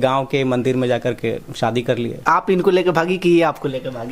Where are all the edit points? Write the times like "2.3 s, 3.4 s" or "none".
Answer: 2.1 s